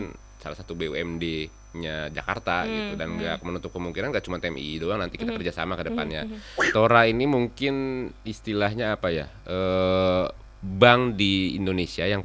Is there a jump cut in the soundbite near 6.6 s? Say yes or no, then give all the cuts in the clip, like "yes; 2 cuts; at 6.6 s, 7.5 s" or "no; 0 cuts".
yes; 1 cut; at 6.6 s